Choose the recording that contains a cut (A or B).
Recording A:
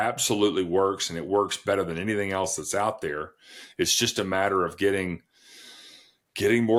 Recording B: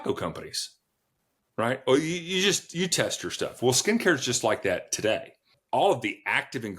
B